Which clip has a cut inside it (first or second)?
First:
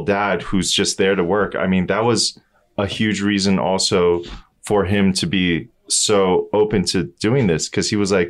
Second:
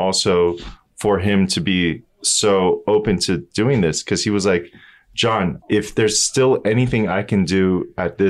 second